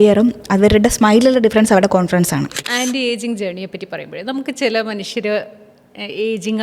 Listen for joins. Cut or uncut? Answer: cut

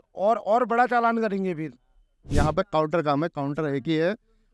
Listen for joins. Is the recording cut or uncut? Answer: cut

